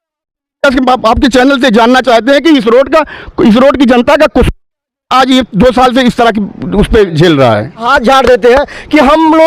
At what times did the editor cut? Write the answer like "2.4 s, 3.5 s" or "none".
7.9 s